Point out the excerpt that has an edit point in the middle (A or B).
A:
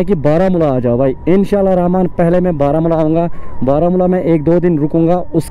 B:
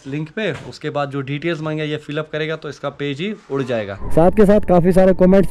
B